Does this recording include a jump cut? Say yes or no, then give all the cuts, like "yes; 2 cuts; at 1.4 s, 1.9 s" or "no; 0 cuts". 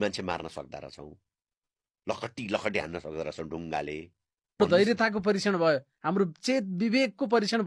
yes; 1 cut; at 4.6 s